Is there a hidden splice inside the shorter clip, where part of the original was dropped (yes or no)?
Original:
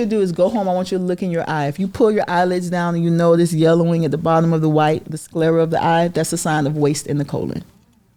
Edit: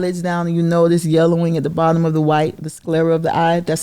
no